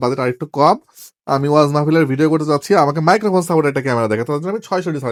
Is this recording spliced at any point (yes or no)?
no